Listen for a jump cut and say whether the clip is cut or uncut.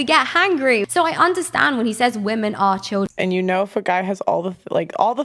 cut